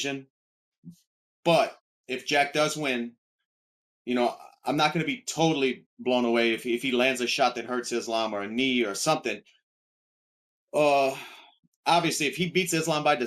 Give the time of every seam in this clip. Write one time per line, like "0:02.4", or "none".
none